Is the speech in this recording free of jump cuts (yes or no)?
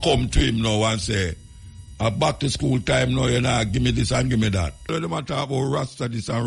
no